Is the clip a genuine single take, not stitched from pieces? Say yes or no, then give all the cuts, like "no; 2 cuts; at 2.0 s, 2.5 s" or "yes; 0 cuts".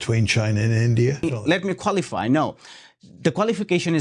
no; 1 cut; at 1.2 s